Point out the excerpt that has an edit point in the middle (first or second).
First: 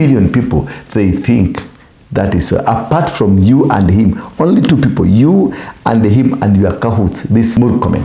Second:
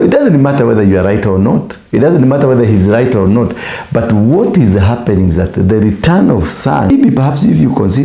second